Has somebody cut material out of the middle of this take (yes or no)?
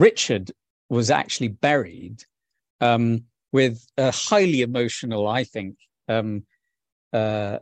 no